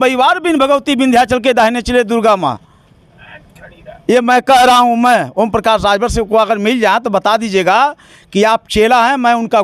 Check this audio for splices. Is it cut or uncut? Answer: uncut